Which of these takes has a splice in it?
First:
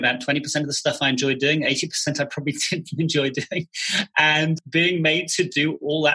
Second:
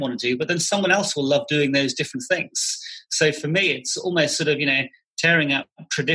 first; 1 cut; at 4.6 s

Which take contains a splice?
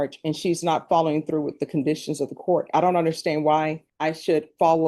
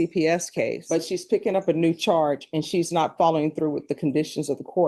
first; 1 cut; at 3.8 s

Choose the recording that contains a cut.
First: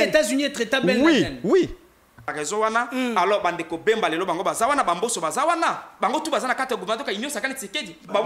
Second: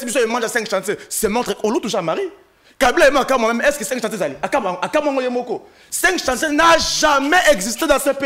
first; 1 cut; at 2.3 s

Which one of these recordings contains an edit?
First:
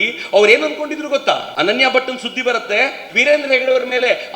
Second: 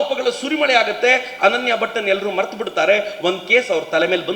first; 2 cuts; at 1.5 s, 3.1 s

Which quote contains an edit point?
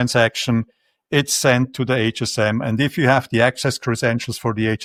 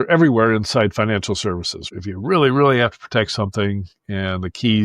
second; 1 cut; at 1.8 s

